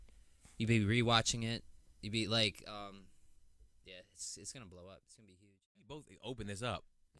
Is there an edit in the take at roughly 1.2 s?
no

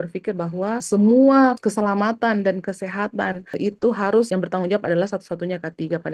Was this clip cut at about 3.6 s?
yes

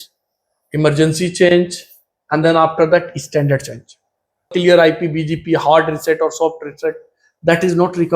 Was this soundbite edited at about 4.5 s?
yes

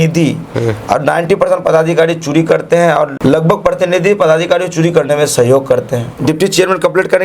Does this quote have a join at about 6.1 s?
yes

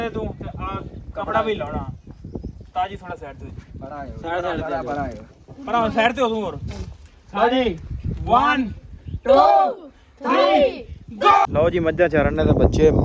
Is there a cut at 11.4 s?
yes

